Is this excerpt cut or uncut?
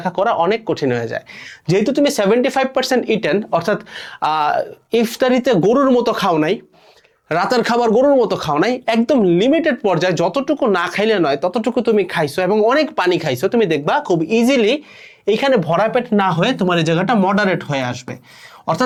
uncut